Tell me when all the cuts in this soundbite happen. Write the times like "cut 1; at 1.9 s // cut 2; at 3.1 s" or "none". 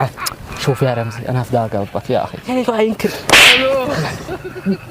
cut 1; at 2.5 s